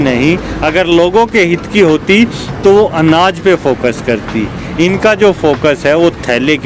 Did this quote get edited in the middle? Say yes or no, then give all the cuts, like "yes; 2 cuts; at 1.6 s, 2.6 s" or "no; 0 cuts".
no; 0 cuts